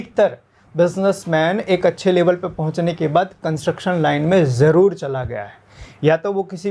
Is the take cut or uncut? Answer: uncut